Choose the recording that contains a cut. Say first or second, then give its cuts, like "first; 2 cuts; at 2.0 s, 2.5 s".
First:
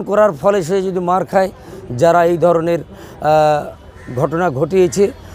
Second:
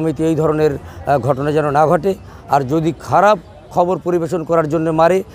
first; 1 cut; at 1.7 s